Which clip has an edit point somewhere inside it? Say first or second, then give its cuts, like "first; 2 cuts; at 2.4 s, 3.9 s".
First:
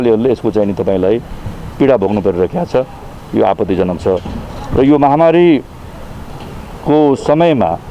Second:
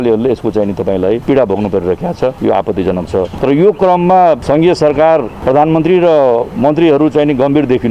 second; 5 cuts; at 1.2 s, 2.4 s, 3.3 s, 4.4 s, 5.3 s